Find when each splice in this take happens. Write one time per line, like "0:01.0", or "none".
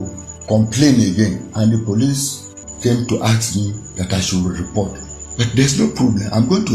none